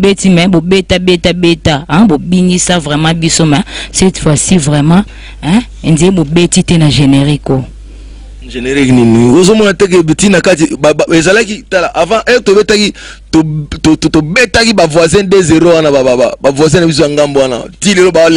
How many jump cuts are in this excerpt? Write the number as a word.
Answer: zero